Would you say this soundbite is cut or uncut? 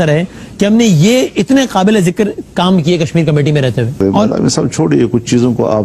uncut